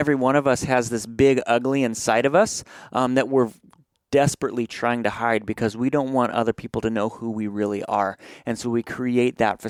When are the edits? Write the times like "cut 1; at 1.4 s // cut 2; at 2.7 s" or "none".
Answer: none